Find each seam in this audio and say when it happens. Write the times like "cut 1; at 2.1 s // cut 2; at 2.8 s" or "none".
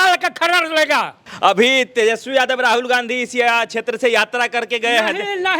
cut 1; at 1.2 s